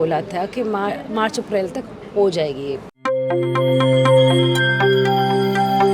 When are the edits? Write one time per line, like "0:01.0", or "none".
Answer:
0:02.9